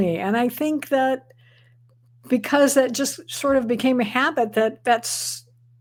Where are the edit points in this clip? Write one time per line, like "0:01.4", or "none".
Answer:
none